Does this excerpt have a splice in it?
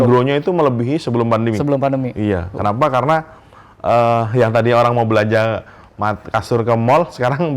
no; 0 cuts

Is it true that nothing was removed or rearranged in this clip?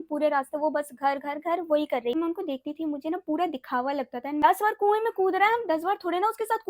no; 2 cuts; at 2.1 s, 4.4 s

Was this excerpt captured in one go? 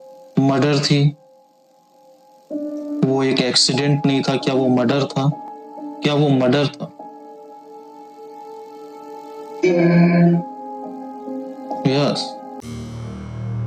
yes; 0 cuts

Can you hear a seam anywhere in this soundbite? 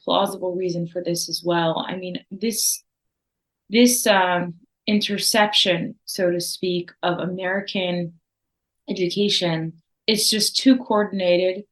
no; 0 cuts

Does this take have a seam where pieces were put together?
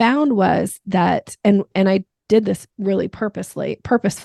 no; 0 cuts

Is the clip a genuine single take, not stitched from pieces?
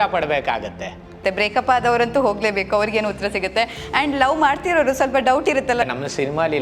no; 2 cuts; at 1.2 s, 5.8 s

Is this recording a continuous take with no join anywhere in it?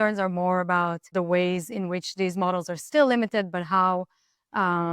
no; 1 cut; at 1.1 s

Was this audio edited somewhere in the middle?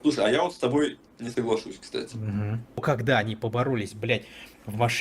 yes; 1 cut; at 2.8 s

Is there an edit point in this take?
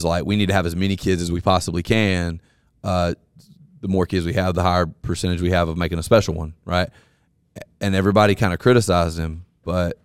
no; 0 cuts

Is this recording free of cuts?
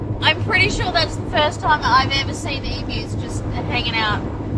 yes; 0 cuts

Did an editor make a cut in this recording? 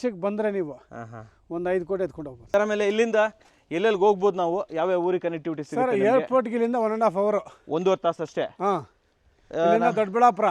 yes; 1 cut; at 2.4 s

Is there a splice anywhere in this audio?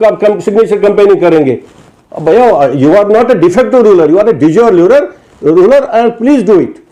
no; 0 cuts

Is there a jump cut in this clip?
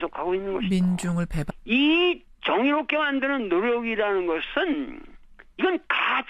yes; 1 cut; at 1.5 s

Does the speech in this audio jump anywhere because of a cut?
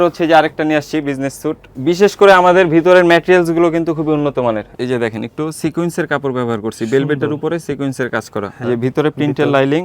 yes; 3 cuts; at 1.7 s, 4.7 s, 8.6 s

